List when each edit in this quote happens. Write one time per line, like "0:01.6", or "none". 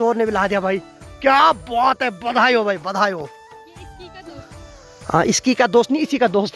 none